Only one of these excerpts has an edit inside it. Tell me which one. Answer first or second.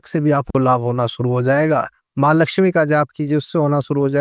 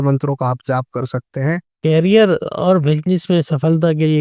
second